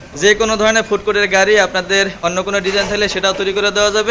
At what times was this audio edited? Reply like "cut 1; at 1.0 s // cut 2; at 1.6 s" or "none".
none